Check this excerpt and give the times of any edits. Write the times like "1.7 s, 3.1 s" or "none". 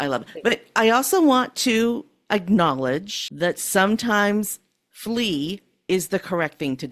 3.2 s